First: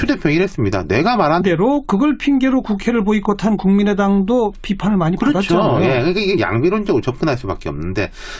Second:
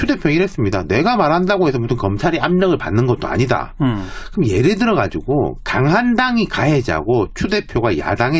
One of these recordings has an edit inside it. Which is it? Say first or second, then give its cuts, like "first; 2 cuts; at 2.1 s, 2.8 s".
second; 1 cut; at 1.4 s